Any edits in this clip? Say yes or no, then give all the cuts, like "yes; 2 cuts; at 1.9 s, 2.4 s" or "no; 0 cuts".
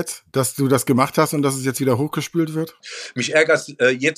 yes; 1 cut; at 2.8 s